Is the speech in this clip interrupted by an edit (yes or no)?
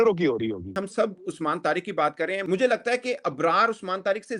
yes